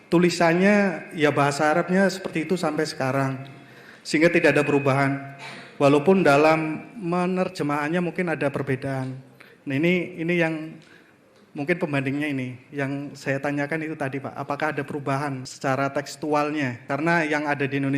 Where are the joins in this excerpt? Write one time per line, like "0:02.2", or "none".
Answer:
0:15.5
0:16.8